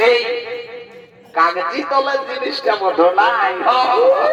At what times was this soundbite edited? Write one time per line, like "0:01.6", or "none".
none